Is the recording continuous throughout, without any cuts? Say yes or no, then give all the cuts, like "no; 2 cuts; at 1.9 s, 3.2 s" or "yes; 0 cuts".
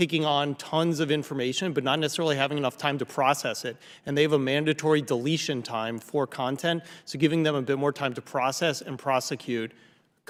yes; 0 cuts